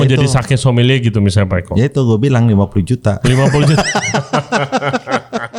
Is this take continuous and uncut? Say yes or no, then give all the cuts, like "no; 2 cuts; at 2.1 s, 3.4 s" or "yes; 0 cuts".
yes; 0 cuts